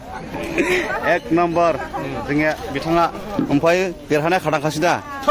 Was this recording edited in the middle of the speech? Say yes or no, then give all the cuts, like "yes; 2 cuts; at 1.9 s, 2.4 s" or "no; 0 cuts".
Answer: no; 0 cuts